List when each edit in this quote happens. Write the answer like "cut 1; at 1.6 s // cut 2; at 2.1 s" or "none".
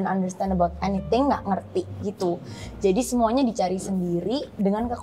none